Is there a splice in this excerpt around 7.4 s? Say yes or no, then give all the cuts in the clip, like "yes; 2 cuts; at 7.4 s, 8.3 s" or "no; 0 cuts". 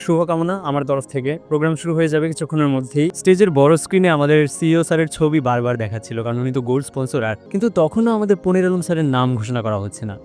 yes; 2 cuts; at 3.1 s, 7.4 s